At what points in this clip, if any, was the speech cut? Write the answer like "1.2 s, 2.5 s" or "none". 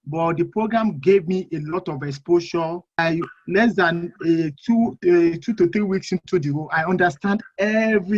3.0 s

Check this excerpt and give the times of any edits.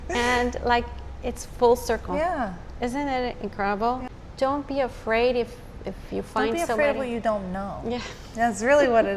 4.1 s

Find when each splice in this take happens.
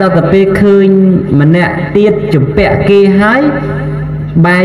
none

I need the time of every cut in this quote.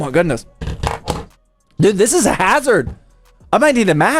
none

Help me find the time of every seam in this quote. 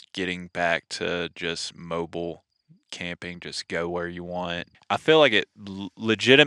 4.7 s

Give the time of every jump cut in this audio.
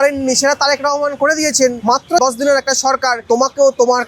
2.0 s, 3.2 s

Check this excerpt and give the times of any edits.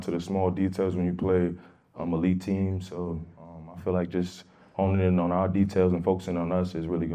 none

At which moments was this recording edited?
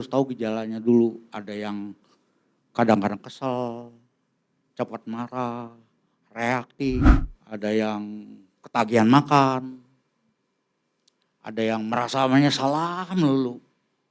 7.2 s

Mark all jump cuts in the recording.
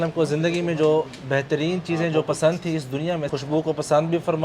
3.3 s

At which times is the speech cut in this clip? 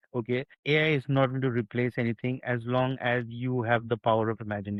none

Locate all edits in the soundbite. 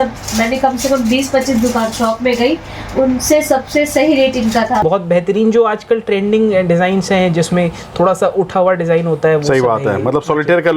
4.8 s

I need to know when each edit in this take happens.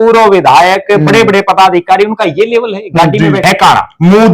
3.4 s

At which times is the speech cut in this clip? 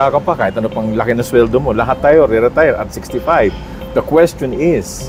none

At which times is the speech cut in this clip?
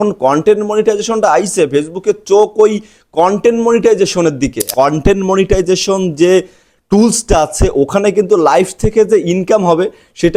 4.7 s

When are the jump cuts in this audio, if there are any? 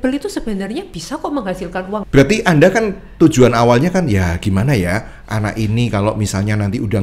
2.0 s

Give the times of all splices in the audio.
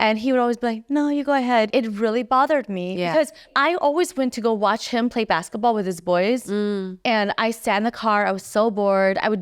1.7 s, 3.5 s

